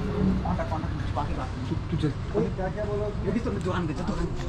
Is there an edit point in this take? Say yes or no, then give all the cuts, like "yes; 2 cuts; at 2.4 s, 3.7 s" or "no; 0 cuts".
no; 0 cuts